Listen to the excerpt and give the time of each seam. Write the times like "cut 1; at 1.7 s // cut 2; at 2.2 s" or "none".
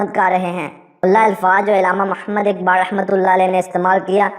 cut 1; at 1.0 s